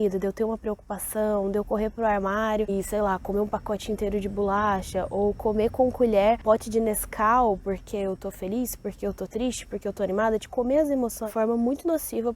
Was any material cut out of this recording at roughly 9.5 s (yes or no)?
no